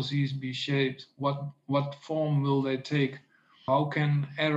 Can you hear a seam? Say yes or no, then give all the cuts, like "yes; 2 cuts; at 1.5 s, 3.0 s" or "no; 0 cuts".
yes; 1 cut; at 3.6 s